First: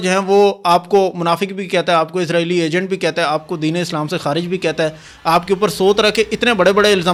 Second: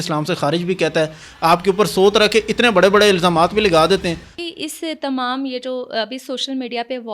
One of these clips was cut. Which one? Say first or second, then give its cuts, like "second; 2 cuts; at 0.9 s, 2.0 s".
second; 1 cut; at 4.3 s